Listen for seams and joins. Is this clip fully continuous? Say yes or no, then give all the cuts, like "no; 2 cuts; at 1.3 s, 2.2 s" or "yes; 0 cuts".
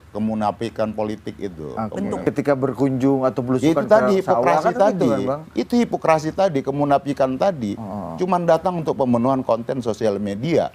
no; 1 cut; at 2.2 s